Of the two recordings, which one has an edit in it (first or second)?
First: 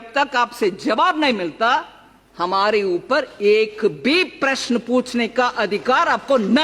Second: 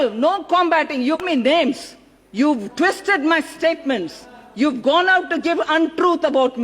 second